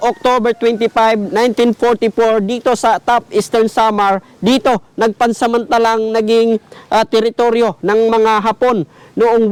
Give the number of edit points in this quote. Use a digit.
0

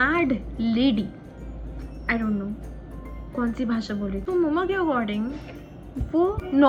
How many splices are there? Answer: 0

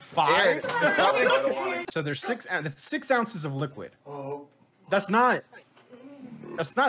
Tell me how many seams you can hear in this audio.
1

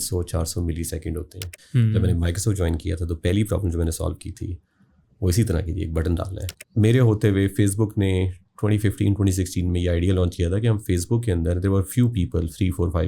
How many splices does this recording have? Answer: 2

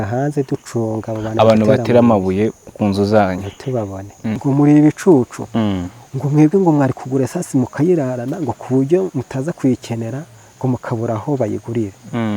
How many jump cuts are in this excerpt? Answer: 1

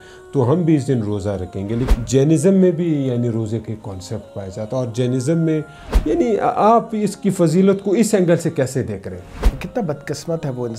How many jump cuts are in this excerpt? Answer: 3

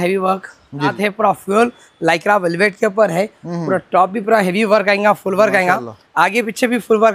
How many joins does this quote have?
1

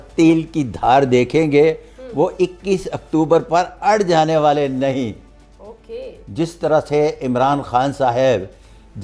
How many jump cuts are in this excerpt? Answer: 0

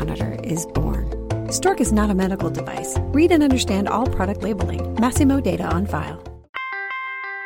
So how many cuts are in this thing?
1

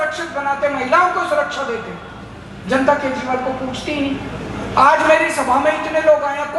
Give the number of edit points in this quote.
0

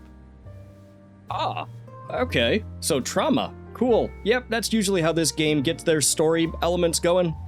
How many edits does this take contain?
1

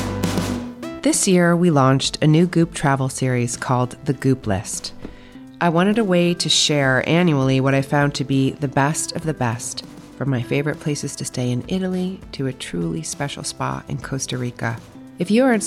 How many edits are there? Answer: 1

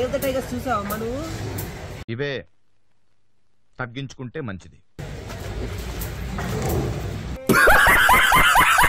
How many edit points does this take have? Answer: 1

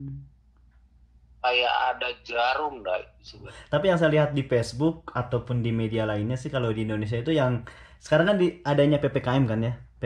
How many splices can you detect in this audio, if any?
1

